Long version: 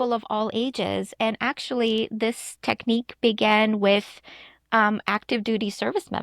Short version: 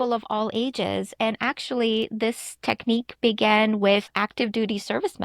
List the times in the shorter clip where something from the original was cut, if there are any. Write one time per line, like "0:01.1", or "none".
0:04.1